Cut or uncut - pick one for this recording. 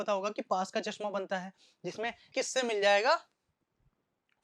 cut